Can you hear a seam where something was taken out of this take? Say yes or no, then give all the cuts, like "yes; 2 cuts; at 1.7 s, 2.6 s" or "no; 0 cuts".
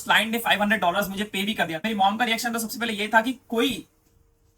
yes; 1 cut; at 1.8 s